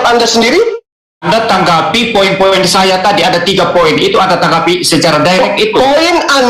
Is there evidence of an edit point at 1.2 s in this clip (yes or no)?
yes